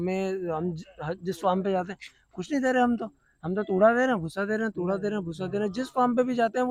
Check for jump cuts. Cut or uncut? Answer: uncut